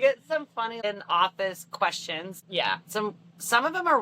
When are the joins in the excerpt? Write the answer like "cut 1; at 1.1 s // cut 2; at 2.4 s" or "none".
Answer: cut 1; at 0.8 s // cut 2; at 2.4 s